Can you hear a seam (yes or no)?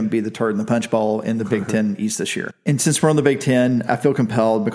yes